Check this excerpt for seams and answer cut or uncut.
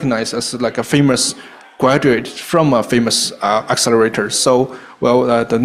uncut